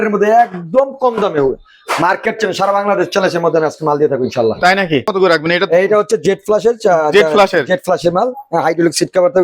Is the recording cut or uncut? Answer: cut